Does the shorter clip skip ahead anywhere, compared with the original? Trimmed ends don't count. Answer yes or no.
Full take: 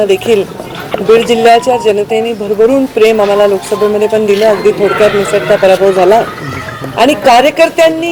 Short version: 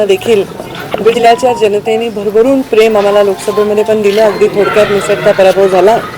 yes